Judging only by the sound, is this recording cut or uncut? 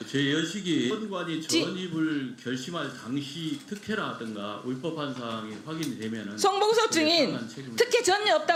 uncut